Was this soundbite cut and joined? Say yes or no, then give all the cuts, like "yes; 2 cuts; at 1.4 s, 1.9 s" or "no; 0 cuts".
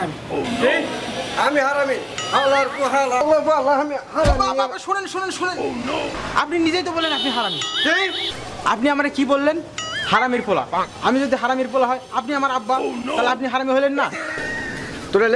no; 0 cuts